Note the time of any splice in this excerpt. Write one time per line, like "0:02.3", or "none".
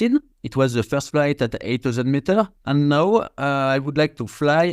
0:02.6